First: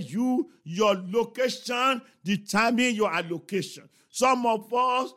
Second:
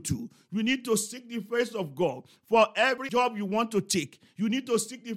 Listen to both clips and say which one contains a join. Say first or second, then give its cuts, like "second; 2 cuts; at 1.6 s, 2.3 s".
second; 1 cut; at 3.0 s